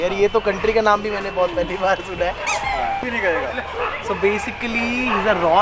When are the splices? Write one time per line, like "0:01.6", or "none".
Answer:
0:03.0